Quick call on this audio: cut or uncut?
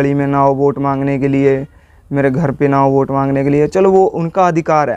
uncut